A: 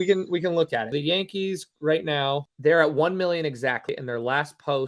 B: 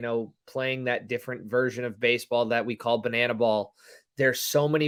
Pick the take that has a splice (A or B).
A